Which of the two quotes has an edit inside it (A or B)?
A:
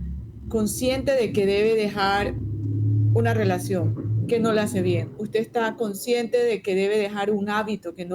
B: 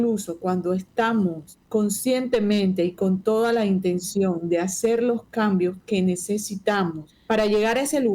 B